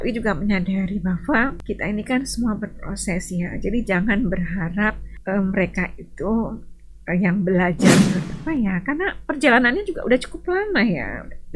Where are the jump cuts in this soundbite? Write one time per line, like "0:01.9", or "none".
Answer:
0:01.6
0:05.1
0:08.2